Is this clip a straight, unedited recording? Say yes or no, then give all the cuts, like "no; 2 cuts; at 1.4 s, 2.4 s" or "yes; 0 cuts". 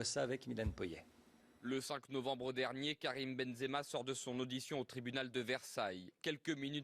no; 1 cut; at 5.6 s